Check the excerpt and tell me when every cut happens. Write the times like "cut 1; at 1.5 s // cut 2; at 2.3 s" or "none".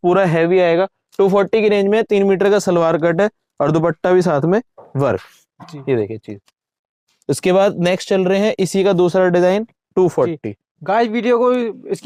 none